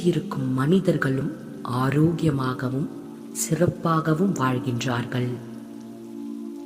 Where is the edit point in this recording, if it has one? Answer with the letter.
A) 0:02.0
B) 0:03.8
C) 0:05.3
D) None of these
C